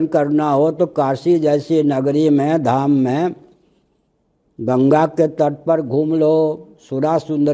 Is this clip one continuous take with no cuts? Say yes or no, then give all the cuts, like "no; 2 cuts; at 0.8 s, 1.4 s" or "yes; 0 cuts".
yes; 0 cuts